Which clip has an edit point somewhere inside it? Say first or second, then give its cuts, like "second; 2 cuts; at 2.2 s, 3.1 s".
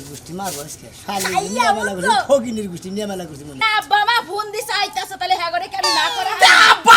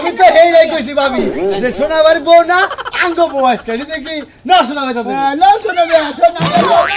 first; 1 cut; at 3.7 s